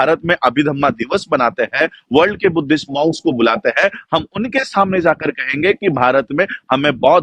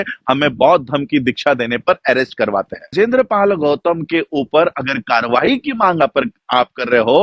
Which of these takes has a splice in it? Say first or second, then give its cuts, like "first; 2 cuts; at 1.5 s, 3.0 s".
second; 1 cut; at 2.9 s